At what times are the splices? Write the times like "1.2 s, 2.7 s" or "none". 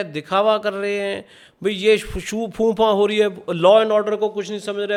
none